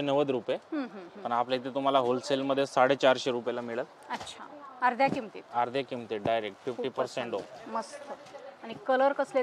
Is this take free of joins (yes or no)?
yes